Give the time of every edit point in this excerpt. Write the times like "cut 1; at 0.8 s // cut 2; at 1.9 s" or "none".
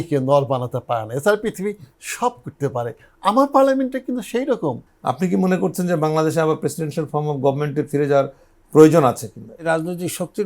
cut 1; at 4.9 s // cut 2; at 9.6 s